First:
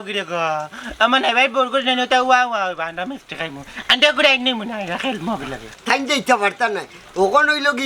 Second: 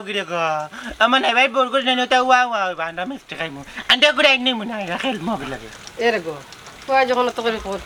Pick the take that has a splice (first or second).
first